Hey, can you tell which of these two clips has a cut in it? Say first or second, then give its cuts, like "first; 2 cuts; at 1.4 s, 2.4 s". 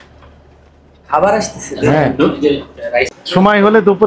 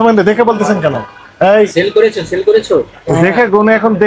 first; 1 cut; at 3.1 s